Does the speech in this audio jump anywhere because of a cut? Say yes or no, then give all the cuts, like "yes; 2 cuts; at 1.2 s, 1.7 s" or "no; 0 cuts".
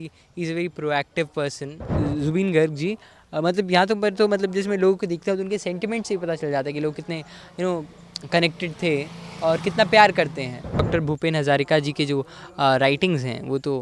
yes; 2 cuts; at 1.9 s, 10.9 s